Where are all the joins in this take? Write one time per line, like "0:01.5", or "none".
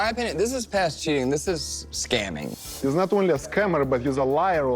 0:02.5